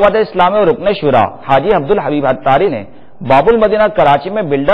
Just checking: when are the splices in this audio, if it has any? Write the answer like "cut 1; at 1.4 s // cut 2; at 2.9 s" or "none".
cut 1; at 1.4 s // cut 2; at 2.7 s